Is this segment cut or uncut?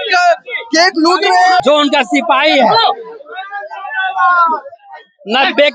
cut